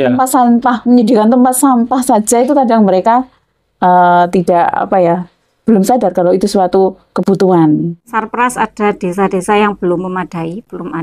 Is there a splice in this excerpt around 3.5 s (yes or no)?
no